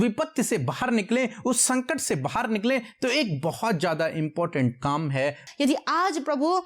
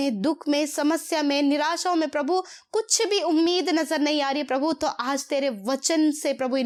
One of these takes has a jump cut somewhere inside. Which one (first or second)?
first